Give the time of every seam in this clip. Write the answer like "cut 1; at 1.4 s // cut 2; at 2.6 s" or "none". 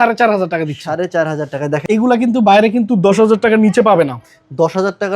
cut 1; at 1.8 s